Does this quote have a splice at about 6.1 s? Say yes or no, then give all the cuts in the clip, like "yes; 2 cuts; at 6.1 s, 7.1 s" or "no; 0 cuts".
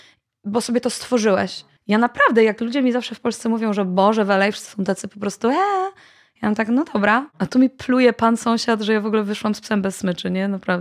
no; 2 cuts; at 1.7 s, 7.4 s